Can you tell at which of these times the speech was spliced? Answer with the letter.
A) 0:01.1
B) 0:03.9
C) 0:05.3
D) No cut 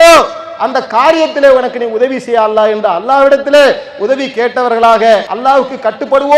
C